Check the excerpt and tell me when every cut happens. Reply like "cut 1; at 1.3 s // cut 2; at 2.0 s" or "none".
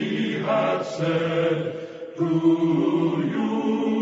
cut 1; at 1.3 s